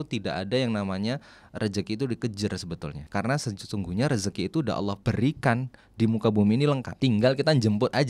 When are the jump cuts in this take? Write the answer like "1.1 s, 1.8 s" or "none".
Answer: 3.0 s, 5.0 s, 6.9 s